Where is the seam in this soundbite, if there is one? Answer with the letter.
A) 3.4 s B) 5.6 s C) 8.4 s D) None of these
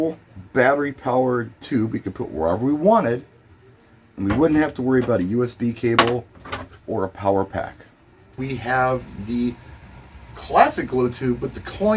C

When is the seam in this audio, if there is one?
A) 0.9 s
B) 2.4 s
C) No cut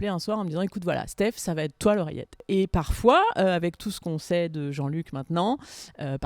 B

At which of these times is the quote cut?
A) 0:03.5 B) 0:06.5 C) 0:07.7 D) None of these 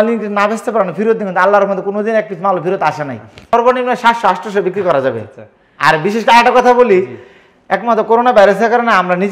A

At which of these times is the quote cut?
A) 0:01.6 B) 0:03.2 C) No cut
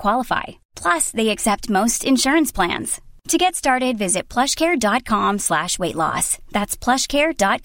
C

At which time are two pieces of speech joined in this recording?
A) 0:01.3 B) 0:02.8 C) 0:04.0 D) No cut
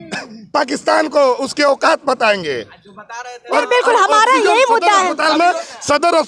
D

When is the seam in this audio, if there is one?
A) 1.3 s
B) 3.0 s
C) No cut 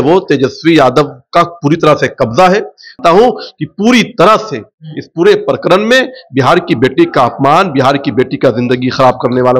B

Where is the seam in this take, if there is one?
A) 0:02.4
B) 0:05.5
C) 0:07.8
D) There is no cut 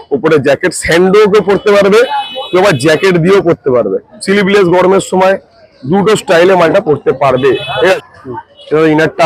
C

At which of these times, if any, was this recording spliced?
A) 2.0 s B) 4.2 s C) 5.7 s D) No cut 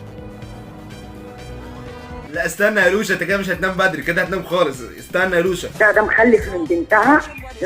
C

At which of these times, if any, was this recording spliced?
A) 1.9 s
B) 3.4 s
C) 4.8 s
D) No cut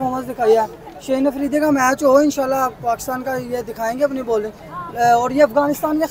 D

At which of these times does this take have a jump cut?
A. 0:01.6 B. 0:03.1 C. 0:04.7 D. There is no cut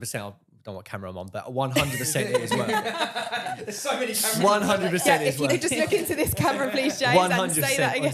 D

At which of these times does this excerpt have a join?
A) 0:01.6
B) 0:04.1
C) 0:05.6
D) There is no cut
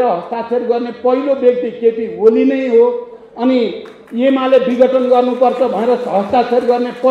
D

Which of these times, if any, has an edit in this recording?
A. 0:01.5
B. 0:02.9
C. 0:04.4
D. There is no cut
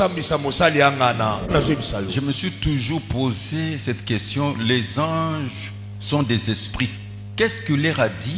A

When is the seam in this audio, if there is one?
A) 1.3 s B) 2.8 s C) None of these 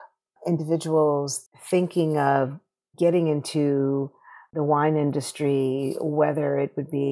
A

